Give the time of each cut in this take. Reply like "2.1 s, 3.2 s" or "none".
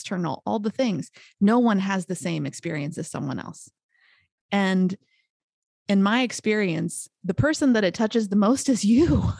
4.2 s